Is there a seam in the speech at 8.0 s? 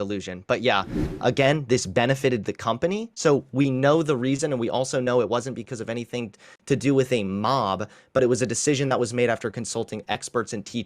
no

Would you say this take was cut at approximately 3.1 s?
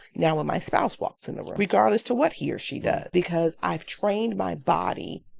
yes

